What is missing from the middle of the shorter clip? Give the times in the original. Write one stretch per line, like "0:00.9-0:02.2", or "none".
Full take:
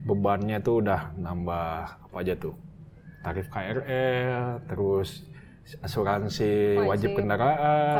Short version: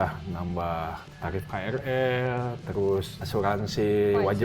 0:02.0-0:03.1
0:05.2-0:05.8